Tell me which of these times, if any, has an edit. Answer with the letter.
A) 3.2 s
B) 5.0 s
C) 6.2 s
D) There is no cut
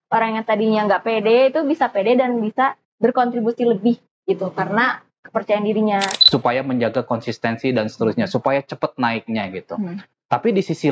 C